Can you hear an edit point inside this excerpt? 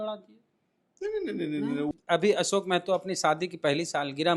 yes; 1 cut; at 1.9 s

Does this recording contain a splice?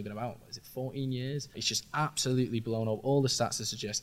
yes; 1 cut; at 1.6 s

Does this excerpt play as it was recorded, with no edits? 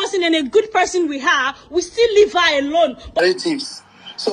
no; 1 cut; at 3.2 s

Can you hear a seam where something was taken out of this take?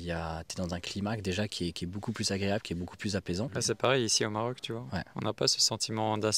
no; 0 cuts

